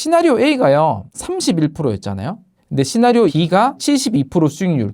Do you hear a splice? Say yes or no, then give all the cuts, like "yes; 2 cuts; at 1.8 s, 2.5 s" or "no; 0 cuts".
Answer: yes; 2 cuts; at 1.1 s, 3.8 s